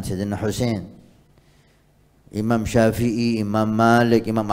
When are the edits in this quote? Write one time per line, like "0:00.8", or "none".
none

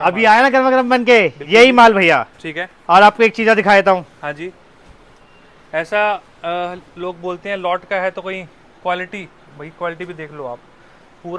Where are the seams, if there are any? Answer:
none

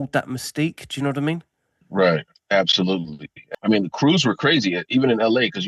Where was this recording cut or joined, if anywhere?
0:03.4

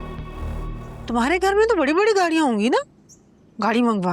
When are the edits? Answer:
0:00.9

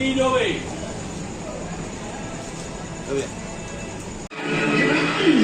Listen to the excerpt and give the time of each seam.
0:04.3

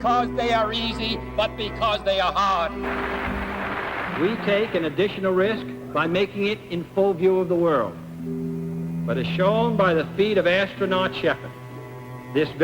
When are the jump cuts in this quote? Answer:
0:01.0

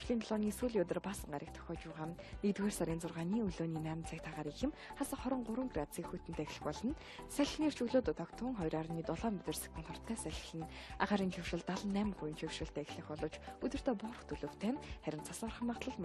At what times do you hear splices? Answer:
0:02.6

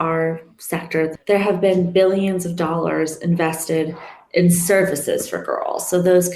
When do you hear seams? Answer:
0:01.1

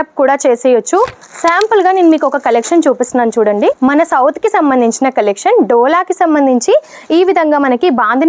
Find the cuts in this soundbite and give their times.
0:01.2
0:03.8

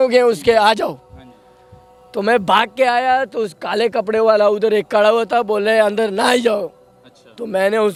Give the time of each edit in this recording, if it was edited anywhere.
none

